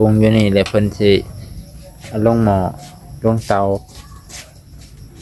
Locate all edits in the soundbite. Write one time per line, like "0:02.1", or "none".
none